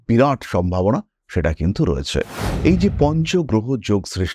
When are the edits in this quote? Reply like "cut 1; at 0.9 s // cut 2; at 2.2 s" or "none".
cut 1; at 2.4 s